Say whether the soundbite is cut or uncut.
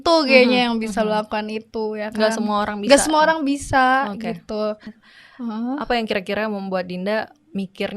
cut